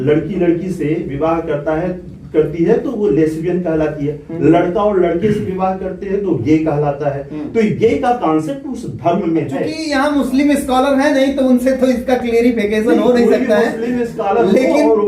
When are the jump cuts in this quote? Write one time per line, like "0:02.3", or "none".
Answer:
0:09.8